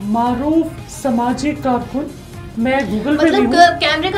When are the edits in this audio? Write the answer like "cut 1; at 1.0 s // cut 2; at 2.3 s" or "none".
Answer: cut 1; at 2.5 s

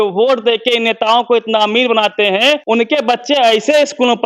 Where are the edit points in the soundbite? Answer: cut 1; at 2.6 s

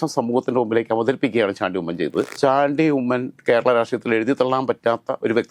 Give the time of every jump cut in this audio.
cut 1; at 2.3 s

